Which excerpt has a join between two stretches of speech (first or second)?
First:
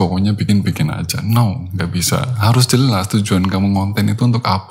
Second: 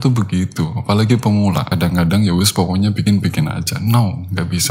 second